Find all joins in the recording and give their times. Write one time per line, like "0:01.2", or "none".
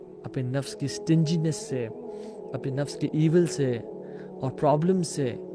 none